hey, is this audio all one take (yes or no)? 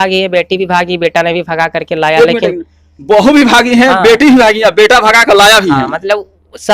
yes